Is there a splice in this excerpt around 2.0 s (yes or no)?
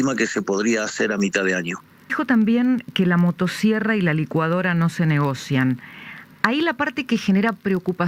no